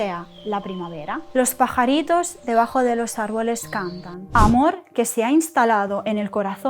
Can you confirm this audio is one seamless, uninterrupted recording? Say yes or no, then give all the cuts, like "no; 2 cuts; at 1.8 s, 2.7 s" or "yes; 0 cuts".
no; 1 cut; at 4.2 s